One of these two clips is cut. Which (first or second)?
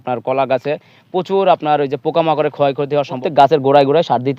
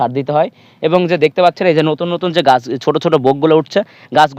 first